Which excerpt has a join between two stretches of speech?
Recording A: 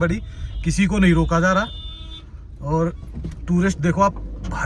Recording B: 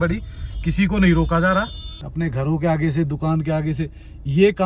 B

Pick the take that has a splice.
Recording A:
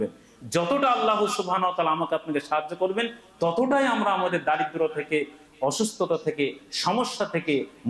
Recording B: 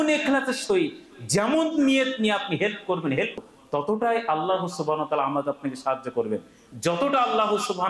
B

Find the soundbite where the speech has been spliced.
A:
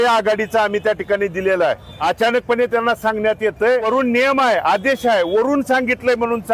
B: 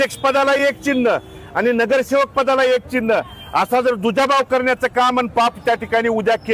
A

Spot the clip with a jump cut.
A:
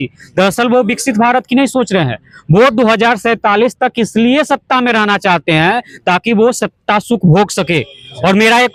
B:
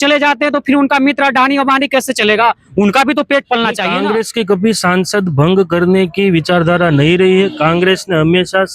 B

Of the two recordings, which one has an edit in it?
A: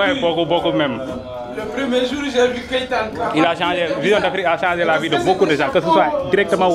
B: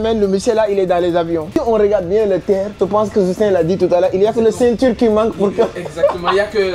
B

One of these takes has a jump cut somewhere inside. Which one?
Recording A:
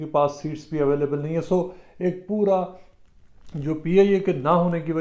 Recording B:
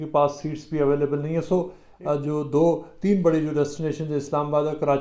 B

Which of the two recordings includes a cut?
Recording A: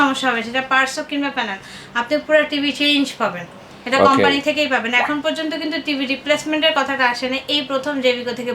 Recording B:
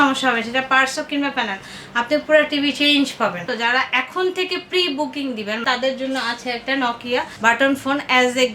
B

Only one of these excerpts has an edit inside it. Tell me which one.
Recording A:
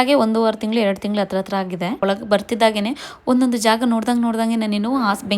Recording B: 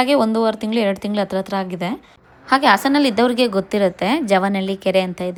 A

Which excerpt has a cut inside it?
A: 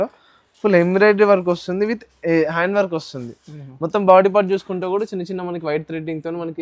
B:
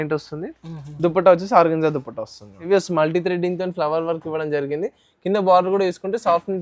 B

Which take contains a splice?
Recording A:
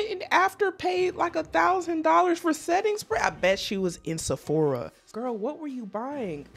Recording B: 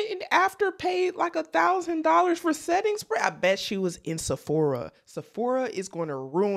A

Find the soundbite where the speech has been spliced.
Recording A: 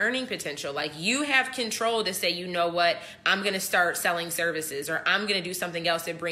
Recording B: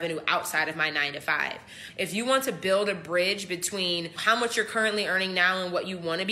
B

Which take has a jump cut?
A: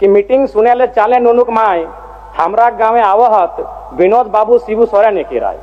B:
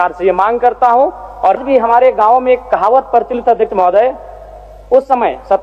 B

